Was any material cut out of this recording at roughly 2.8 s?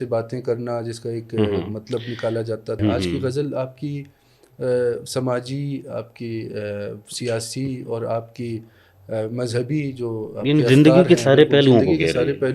yes; 1 cut; at 2.8 s

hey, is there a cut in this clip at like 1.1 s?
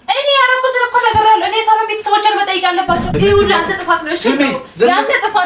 no; 1 cut; at 3.1 s

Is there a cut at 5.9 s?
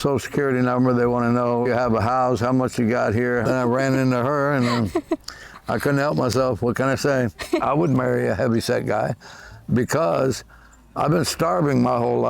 no; 3 cuts; at 1.7 s, 3.4 s, 7.6 s

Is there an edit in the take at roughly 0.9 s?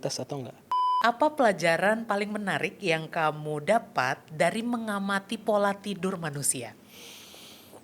yes; 1 cut; at 0.9 s

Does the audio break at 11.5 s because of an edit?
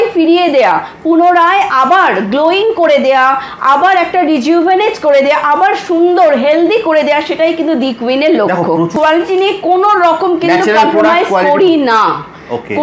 no; 1 cut; at 8.9 s

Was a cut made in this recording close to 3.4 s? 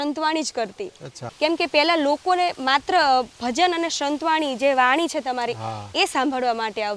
no; 1 cut; at 1.2 s

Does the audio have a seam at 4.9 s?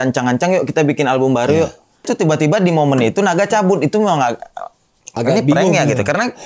no; 1 cut; at 2.1 s

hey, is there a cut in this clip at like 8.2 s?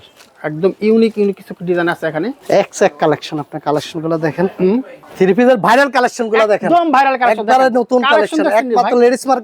no; 2 cuts; at 2.4 s, 5.0 s

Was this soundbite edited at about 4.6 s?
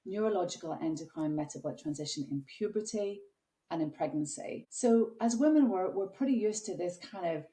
yes; 1 cut; at 4.6 s

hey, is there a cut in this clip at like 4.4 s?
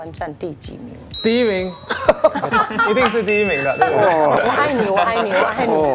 yes; 2 cuts; at 1.0 s, 4.4 s

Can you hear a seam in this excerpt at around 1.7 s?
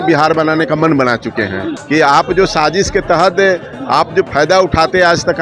yes; 1 cut; at 1.7 s

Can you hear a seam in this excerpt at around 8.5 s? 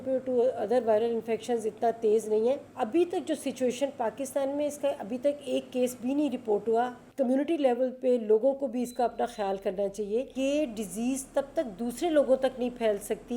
no; 3 cuts; at 2.7 s, 7.0 s, 10.3 s

